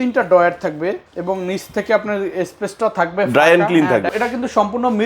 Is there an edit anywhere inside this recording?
yes; 1 cut; at 4.1 s

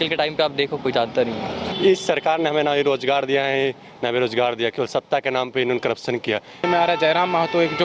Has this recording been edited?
yes; 2 cuts; at 1.6 s, 6.6 s

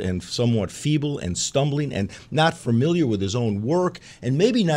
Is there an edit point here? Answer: no; 0 cuts

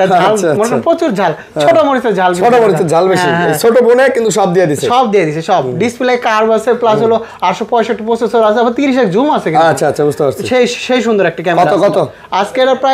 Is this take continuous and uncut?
yes; 0 cuts

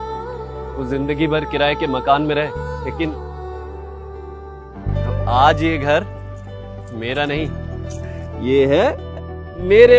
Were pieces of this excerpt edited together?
no; 0 cuts

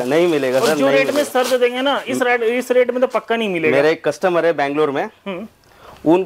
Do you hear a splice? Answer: no; 0 cuts

